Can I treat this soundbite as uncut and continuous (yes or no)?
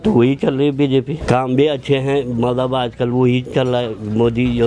no